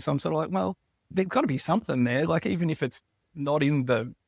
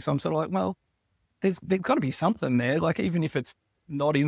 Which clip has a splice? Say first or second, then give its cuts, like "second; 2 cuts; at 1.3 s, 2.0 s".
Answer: first; 1 cut; at 1.1 s